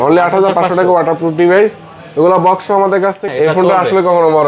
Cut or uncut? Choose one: cut